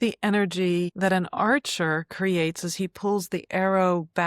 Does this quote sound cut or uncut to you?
cut